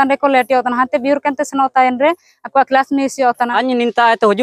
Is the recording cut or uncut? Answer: cut